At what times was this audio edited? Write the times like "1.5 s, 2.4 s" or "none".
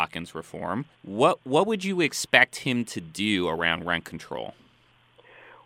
1.0 s